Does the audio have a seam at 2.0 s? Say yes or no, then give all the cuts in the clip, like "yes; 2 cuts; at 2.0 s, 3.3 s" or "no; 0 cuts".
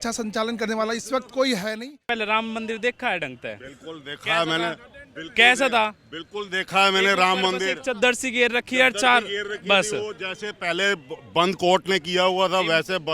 yes; 1 cut; at 2.0 s